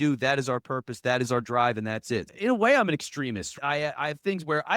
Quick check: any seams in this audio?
yes; 1 cut; at 2.4 s

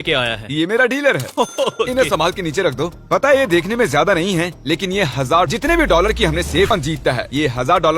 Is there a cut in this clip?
no; 0 cuts

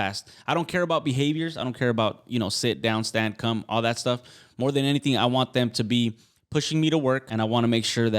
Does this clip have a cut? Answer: yes; 1 cut; at 7.3 s

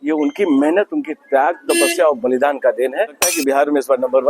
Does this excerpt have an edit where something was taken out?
yes; 1 cut; at 3.4 s

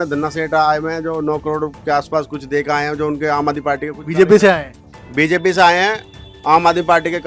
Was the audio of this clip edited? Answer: no; 0 cuts

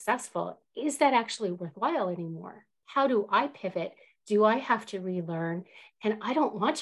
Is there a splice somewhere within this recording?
yes; 1 cut; at 2.7 s

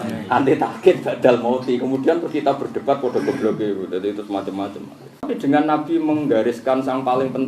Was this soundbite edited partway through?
yes; 1 cut; at 5.2 s

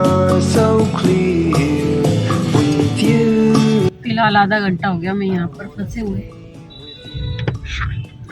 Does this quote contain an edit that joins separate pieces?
yes; 1 cut; at 3.9 s

